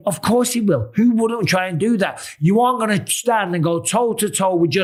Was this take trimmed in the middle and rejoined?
no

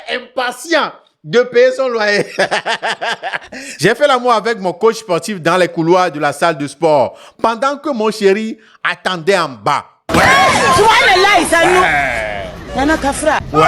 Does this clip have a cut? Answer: yes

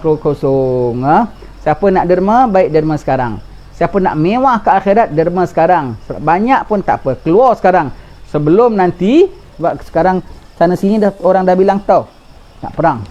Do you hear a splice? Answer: yes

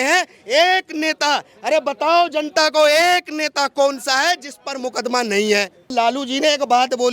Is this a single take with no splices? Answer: no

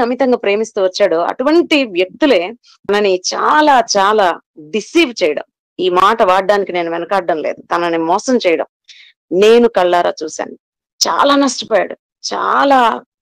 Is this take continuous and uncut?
yes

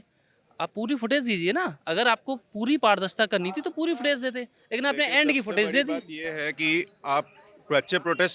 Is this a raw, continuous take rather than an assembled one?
yes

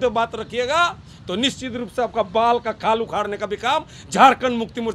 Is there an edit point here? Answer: no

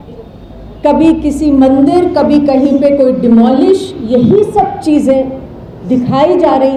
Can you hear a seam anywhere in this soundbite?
no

